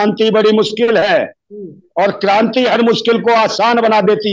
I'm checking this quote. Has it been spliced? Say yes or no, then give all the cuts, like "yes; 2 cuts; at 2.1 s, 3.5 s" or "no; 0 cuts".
no; 0 cuts